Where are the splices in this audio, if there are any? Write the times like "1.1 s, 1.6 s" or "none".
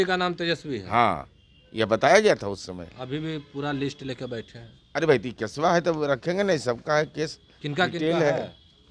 none